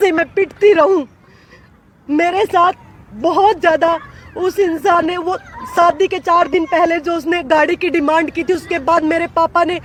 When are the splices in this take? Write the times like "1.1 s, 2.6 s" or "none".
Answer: none